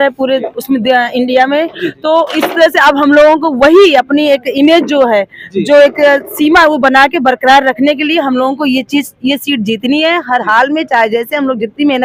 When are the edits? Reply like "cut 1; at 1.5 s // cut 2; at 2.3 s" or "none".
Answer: none